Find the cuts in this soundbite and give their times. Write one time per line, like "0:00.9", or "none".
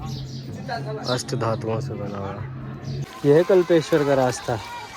0:03.1